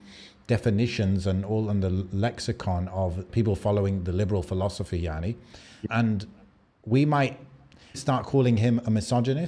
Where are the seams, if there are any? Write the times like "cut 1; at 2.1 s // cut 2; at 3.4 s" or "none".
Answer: cut 1; at 3.3 s // cut 2; at 5.8 s // cut 3; at 8.0 s